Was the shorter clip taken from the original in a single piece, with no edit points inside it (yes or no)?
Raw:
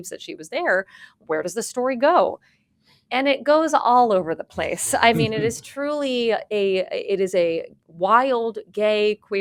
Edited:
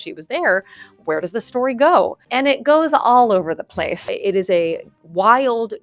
no